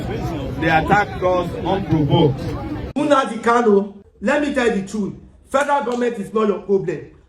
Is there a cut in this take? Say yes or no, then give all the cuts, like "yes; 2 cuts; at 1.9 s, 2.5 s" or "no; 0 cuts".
yes; 1 cut; at 2.8 s